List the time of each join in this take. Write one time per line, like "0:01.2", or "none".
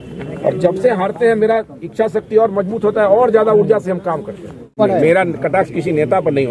0:04.7